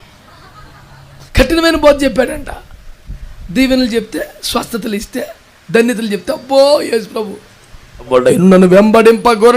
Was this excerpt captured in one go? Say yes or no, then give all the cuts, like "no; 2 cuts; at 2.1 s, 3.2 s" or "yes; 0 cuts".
no; 2 cuts; at 1.3 s, 8.1 s